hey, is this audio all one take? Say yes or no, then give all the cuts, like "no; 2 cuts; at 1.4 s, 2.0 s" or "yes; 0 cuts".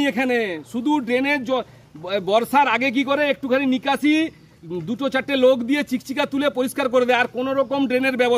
yes; 0 cuts